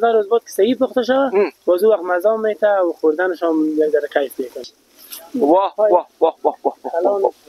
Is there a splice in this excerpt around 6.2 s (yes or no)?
no